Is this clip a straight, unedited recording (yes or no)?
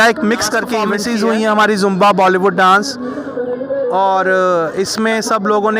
no